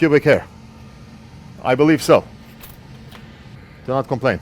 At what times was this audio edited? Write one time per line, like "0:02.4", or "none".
0:03.5